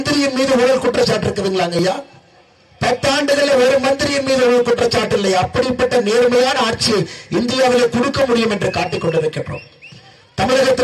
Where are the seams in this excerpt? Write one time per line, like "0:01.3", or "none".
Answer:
none